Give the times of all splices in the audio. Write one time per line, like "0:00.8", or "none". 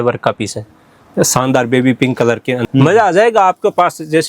0:02.6

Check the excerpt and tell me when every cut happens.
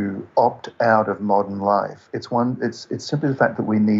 none

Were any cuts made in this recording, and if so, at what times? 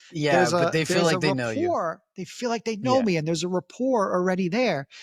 none

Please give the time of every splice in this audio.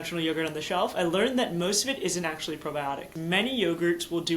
0:03.1

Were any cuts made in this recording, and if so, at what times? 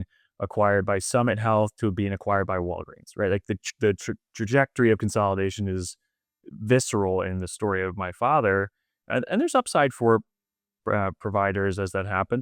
none

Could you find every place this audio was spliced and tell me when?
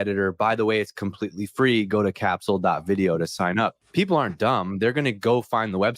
0:03.8

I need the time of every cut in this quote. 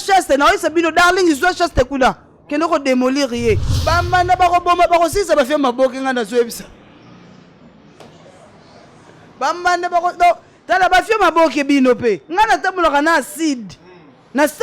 0:03.7

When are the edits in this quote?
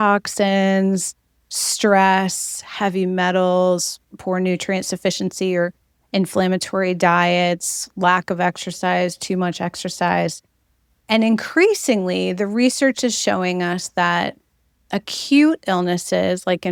none

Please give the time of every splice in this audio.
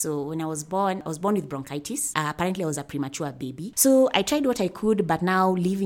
0:01.0
0:02.0
0:03.7

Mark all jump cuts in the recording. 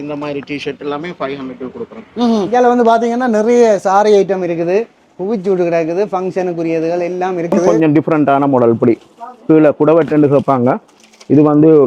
0:02.5
0:07.6

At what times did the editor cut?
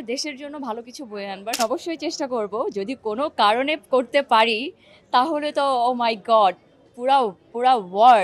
0:01.6

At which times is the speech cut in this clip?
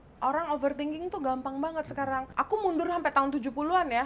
none

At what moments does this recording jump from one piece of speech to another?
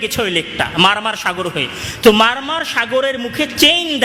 none

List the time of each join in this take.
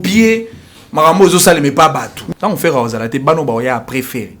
0:02.1

